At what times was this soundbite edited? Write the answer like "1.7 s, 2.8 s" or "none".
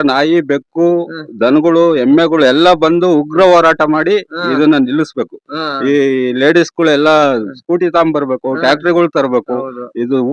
none